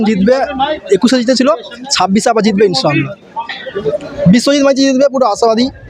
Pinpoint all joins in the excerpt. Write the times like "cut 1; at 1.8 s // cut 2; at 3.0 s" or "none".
cut 1; at 3.7 s